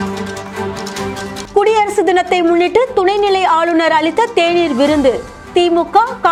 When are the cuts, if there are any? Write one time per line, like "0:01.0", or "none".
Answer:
none